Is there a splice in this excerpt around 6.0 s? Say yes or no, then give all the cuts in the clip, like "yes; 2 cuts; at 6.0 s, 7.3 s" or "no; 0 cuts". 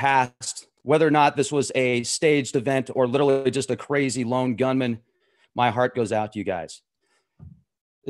no; 1 cut; at 3.3 s